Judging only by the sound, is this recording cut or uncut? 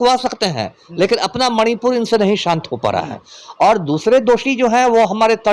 uncut